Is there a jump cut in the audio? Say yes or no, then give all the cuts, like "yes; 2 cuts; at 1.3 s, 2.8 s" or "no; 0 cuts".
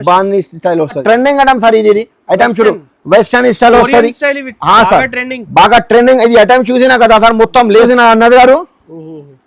yes; 2 cuts; at 1.0 s, 7.9 s